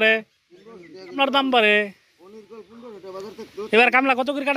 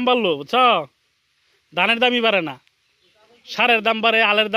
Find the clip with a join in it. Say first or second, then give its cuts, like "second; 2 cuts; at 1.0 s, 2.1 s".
first; 1 cut; at 1.2 s